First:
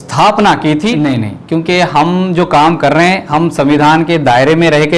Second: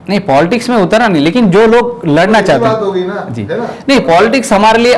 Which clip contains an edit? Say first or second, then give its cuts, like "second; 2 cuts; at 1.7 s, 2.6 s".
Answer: first; 1 cut; at 0.9 s